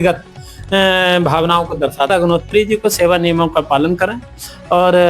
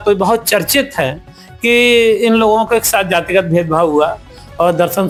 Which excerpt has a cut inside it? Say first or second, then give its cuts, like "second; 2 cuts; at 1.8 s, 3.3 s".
first; 1 cut; at 2.1 s